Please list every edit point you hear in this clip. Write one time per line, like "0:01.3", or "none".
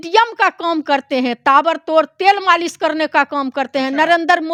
none